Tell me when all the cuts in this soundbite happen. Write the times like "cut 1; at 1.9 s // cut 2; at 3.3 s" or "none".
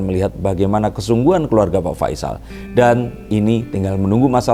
none